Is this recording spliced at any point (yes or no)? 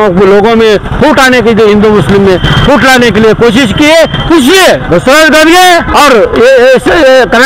yes